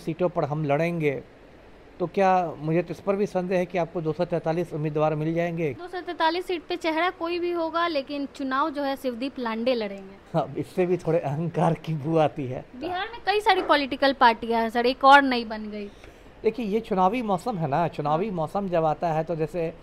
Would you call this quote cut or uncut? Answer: cut